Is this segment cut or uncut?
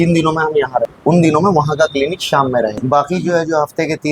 cut